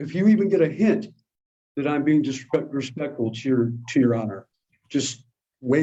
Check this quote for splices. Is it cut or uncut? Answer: uncut